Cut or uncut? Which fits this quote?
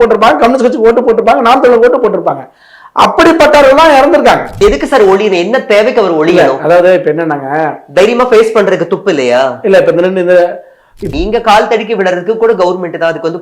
cut